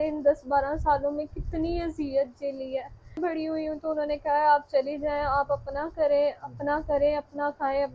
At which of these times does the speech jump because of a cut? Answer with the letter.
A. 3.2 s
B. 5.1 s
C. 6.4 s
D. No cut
A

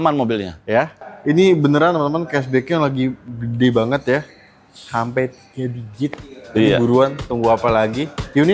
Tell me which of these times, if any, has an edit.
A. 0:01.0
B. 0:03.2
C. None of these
A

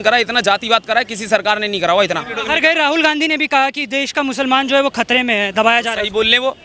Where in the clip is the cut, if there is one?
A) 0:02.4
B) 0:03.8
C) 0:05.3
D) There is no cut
A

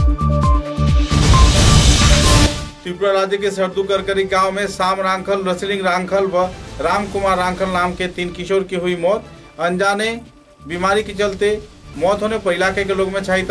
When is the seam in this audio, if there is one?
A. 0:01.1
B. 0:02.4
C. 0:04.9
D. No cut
B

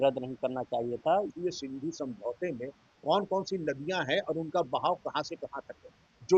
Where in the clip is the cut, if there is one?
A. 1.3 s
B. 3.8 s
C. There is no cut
A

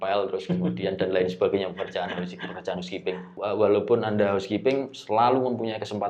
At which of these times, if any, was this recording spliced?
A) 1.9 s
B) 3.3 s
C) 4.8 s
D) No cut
B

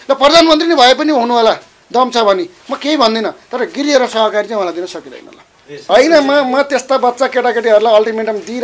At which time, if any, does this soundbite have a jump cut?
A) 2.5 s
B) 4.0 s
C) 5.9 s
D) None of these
C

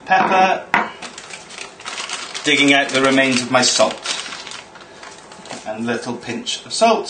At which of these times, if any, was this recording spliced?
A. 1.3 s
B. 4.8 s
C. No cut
B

